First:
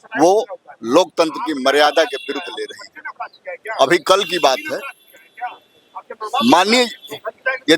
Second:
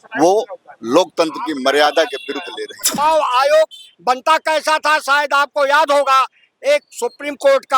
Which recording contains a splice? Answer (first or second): second